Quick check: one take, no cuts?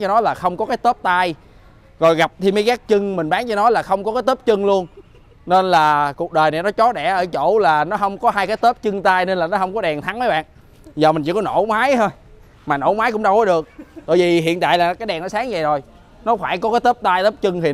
yes; 0 cuts

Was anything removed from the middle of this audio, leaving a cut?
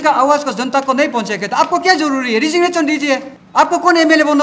yes; 1 cut; at 3.4 s

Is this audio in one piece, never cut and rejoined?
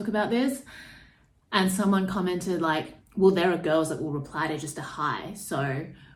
yes; 0 cuts

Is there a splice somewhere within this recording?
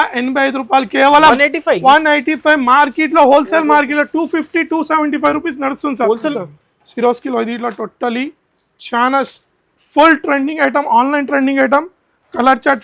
yes; 1 cut; at 6.3 s

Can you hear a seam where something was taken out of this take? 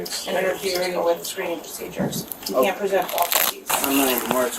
yes; 1 cut; at 3.6 s

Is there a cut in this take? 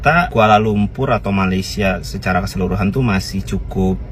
no; 0 cuts

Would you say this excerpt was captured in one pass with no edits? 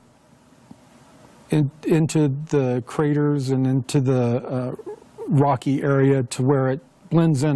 yes; 0 cuts

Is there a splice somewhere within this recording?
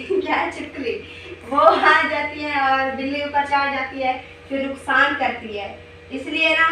no; 0 cuts

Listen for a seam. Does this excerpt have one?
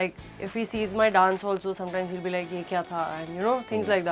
no; 0 cuts

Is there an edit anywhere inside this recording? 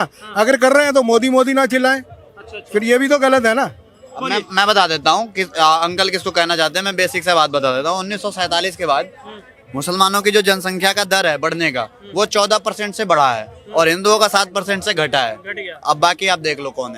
no; 0 cuts

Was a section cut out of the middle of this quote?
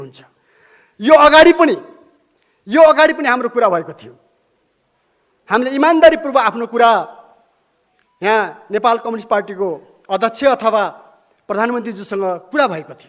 no; 0 cuts

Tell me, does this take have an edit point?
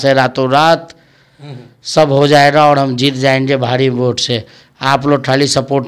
no; 0 cuts

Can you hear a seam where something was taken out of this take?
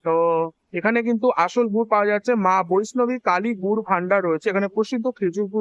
no; 0 cuts

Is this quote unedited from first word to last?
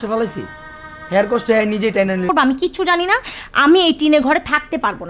no; 1 cut; at 2.3 s

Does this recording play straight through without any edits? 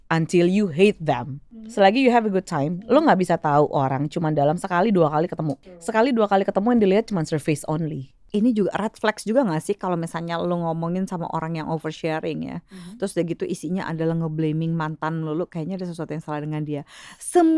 no; 3 cuts; at 1.8 s, 5.9 s, 8.2 s

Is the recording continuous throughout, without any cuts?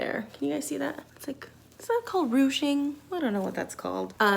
no; 1 cut; at 1.1 s

